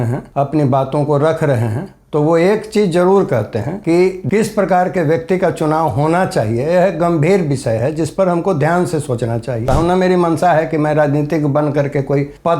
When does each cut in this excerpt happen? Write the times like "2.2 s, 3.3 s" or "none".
4.2 s, 9.7 s